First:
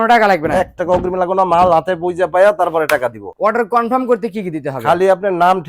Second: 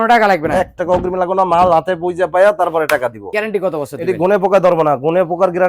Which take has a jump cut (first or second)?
second